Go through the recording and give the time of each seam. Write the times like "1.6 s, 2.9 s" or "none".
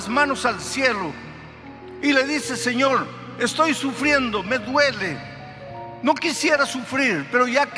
none

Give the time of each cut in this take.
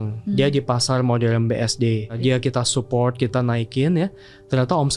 2.2 s

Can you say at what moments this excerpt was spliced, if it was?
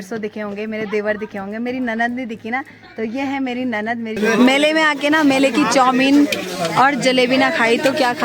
4.2 s

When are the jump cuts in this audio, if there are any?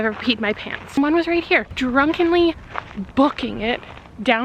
1.0 s, 1.7 s

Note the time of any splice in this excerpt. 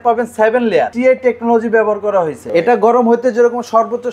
0.9 s, 2.4 s

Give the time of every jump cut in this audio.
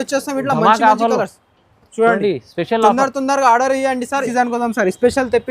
4.3 s

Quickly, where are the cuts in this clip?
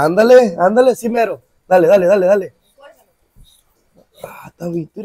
none

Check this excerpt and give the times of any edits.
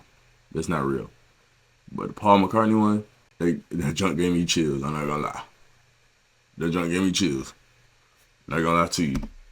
3.2 s

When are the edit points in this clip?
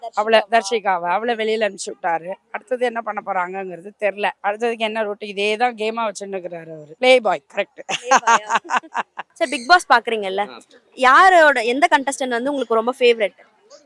none

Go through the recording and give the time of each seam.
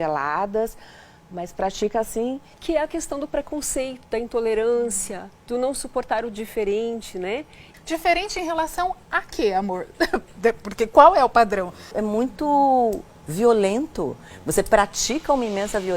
2.5 s, 7.6 s, 11.9 s

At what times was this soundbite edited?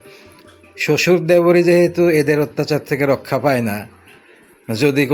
none

